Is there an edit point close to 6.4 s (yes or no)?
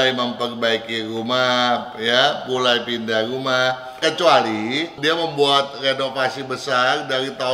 no